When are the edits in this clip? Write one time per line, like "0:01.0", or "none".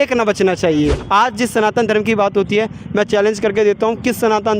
0:01.0